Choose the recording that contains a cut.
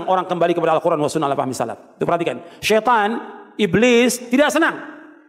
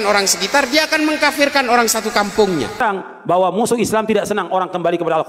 second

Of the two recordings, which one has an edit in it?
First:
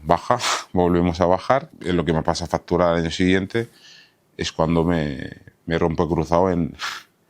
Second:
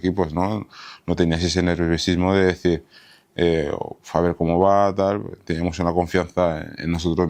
first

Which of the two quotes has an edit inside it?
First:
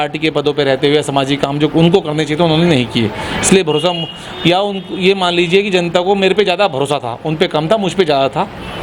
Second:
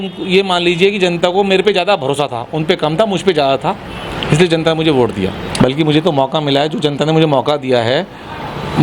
second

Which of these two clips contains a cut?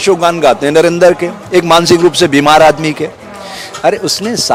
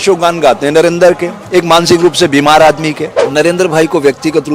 second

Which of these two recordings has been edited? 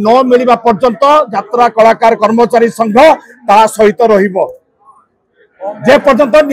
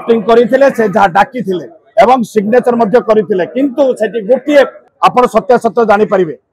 second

